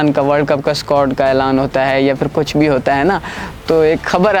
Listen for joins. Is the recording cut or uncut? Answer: uncut